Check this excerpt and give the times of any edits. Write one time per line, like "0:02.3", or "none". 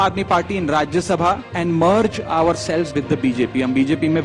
0:01.5